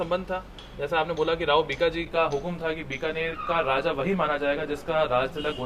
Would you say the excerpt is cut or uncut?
uncut